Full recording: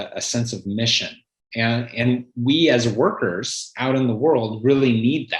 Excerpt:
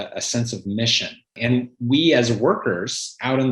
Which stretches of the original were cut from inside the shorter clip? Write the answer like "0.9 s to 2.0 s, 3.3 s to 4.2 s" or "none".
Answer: 1.3 s to 1.9 s